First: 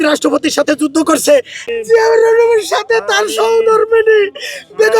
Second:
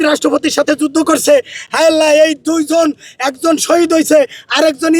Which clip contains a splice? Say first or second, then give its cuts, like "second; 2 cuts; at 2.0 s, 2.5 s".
first; 1 cut; at 1.6 s